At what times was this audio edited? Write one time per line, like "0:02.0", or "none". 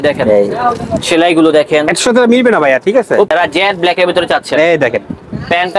0:03.3